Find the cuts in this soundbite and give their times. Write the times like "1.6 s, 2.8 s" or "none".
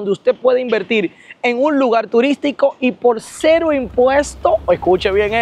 none